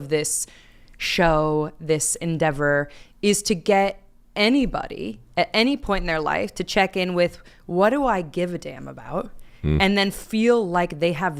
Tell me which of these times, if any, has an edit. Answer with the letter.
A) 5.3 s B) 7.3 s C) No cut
C